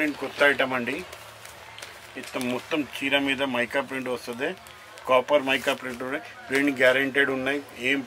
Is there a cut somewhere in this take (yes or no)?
no